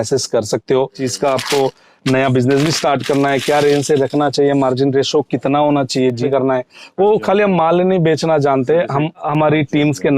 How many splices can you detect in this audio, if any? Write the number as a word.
three